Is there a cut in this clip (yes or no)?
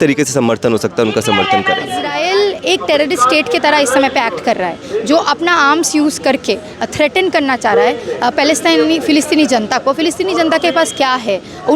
yes